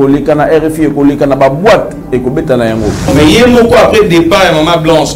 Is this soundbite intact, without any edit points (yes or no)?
no